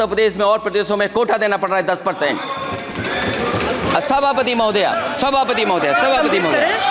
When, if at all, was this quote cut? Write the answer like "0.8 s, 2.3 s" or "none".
none